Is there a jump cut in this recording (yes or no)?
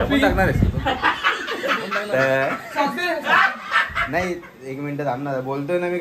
no